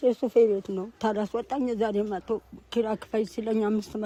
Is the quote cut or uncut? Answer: uncut